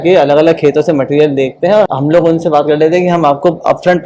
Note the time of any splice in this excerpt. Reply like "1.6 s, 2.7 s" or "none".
1.9 s

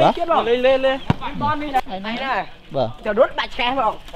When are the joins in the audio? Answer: 1.8 s

